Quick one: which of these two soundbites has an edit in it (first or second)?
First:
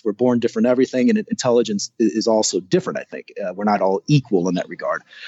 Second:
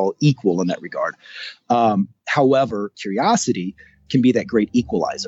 second